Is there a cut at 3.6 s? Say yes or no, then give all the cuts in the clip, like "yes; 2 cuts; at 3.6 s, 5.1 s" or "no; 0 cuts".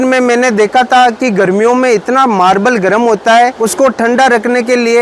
yes; 1 cut; at 3.6 s